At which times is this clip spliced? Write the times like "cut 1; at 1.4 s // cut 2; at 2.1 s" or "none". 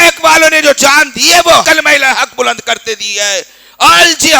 cut 1; at 1.6 s